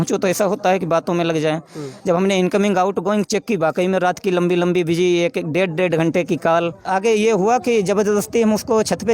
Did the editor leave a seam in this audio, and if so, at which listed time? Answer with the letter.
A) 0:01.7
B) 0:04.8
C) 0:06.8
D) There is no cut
C